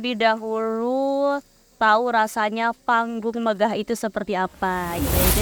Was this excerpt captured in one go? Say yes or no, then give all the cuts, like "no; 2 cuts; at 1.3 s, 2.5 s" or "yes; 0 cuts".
yes; 0 cuts